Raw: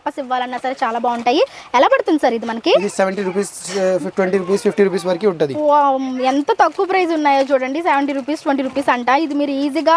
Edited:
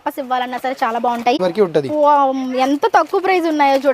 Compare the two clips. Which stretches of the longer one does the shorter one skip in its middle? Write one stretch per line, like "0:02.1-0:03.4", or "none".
0:01.4-0:05.0

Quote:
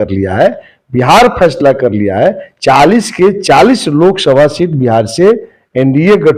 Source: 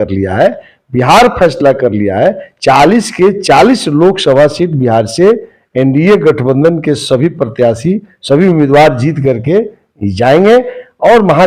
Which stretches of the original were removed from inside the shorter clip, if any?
none

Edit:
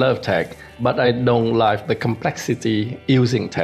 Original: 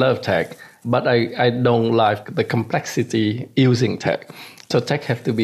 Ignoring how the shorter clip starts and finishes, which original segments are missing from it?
0:00.9-0:01.2
0:02.2-0:02.3

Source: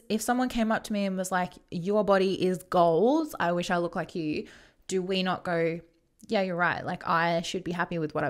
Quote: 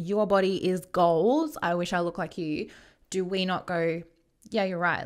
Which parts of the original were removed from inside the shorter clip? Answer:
none

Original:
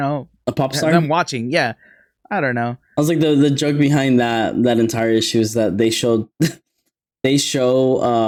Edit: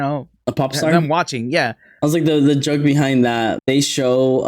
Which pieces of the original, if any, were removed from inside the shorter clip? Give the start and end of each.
0:01.9-0:02.8
0:04.5-0:07.1

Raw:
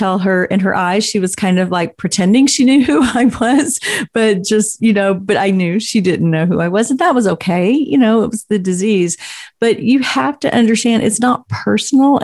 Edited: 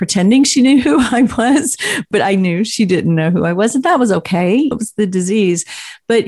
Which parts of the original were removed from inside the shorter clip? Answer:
0:04.1-0:05.2
0:07.9-0:08.3

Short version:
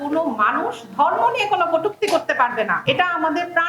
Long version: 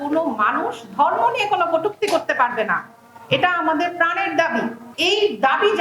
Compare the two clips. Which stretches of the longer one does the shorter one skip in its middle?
0:02.8-0:03.2

